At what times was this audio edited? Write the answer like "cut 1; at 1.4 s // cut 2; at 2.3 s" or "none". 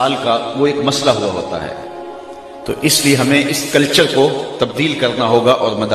none